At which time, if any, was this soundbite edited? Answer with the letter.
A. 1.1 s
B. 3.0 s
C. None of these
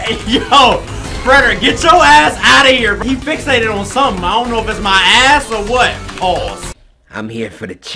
B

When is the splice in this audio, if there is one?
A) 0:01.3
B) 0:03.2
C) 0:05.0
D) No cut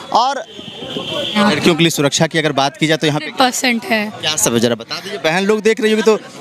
A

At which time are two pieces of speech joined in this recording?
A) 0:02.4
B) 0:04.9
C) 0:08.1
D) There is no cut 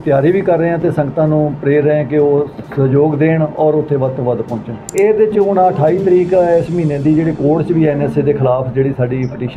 B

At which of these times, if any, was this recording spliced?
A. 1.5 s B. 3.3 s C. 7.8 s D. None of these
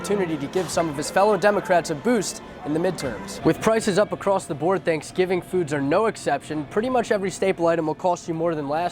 B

